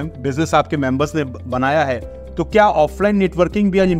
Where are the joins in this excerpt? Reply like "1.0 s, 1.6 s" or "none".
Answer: none